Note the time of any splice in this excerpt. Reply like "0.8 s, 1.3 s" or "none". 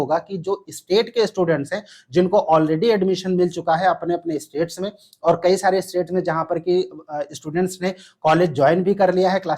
none